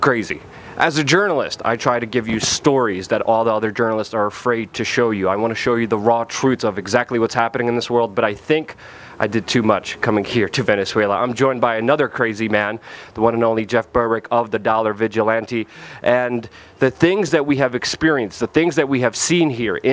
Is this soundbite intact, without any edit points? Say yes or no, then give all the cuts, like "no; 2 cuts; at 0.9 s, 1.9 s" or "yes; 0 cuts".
no; 1 cut; at 15.7 s